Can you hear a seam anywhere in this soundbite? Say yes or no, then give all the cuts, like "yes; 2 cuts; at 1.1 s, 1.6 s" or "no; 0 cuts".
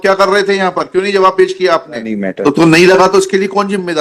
yes; 1 cut; at 2.2 s